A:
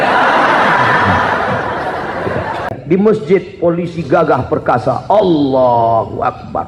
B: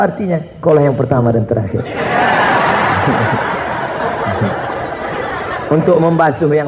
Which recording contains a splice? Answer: A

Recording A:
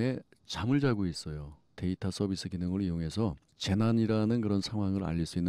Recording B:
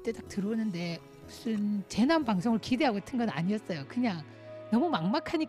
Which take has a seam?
B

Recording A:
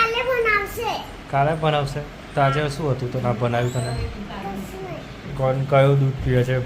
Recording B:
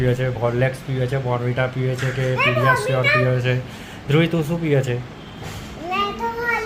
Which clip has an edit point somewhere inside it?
A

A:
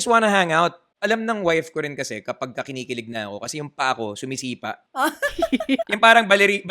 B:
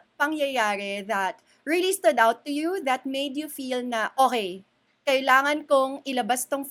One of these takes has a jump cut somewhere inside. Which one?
A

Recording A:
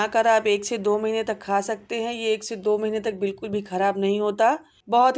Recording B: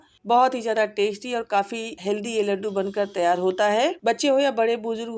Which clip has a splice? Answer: B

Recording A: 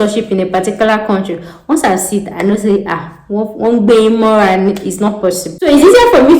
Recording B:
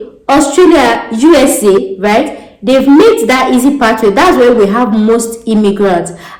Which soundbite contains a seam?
A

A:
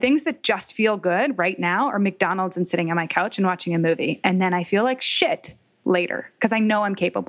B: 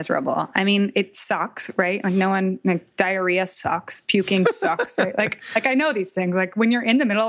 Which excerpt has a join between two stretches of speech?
A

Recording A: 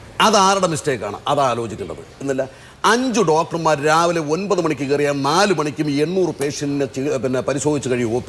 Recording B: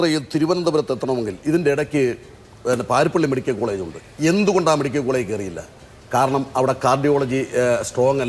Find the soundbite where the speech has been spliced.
A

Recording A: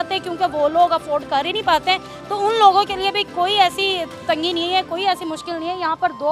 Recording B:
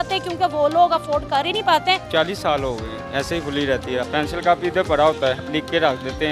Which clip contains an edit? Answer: B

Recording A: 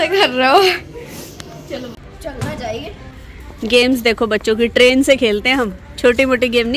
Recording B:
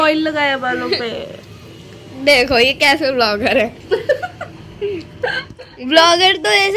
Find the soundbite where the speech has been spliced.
A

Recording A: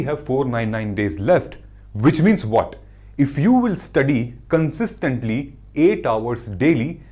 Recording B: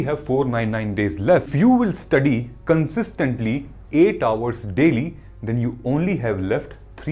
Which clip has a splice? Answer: B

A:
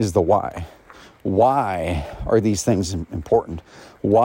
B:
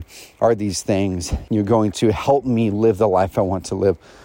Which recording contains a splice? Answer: B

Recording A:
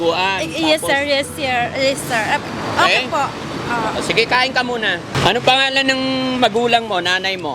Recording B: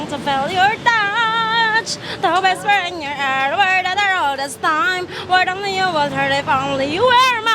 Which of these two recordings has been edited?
A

